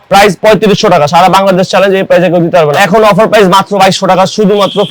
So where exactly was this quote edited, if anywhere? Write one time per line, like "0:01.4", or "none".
0:02.8